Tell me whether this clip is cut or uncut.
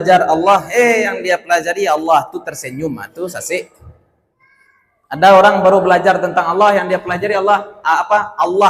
uncut